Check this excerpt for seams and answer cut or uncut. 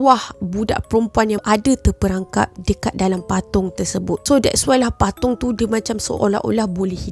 cut